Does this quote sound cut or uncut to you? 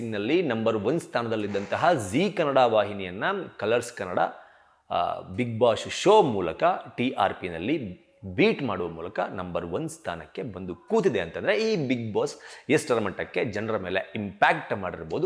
uncut